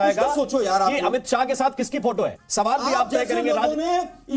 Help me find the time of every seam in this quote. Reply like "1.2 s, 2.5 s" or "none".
2.4 s